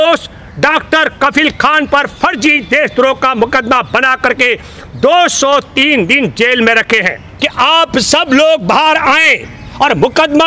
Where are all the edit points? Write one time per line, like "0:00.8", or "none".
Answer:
0:07.2